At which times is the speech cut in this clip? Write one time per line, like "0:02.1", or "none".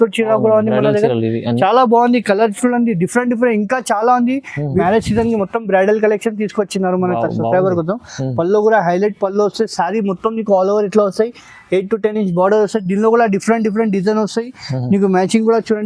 0:04.8